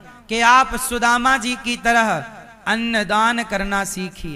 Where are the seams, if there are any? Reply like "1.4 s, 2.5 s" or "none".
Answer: none